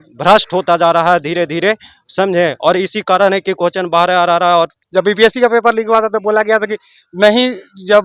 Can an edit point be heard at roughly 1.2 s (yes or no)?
no